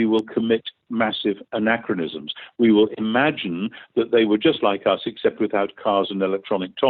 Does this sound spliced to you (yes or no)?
no